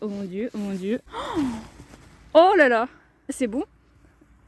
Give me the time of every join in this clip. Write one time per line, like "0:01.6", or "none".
0:01.0
0:03.3

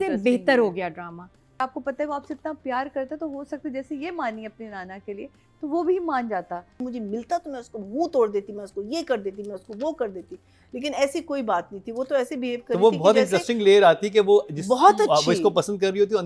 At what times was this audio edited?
0:01.6
0:06.7

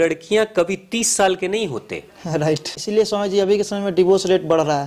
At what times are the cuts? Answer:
0:02.7

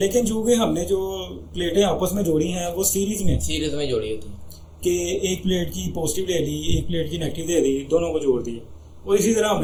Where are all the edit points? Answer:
none

